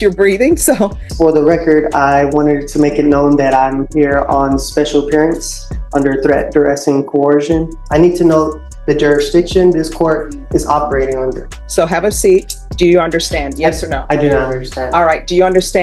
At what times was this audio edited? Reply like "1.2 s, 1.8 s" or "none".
1.0 s, 7.8 s, 11.5 s, 12.6 s